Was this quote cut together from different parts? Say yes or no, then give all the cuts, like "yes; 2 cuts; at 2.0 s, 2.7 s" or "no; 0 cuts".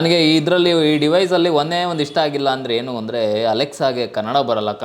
no; 0 cuts